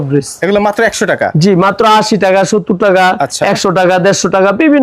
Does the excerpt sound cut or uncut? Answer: uncut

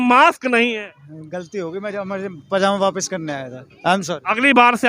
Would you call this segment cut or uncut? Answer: uncut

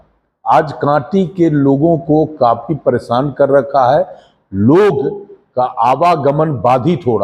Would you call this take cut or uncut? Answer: uncut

